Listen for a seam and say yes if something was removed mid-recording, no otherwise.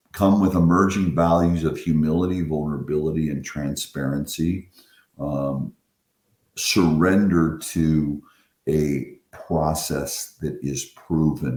no